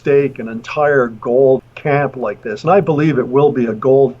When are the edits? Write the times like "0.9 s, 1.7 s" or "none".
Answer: 1.7 s